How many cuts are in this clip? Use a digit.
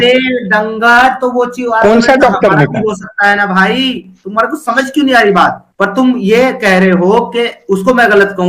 1